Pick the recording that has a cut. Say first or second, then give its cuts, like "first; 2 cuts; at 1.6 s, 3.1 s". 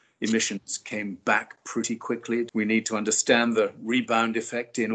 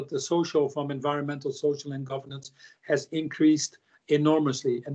first; 1 cut; at 2.5 s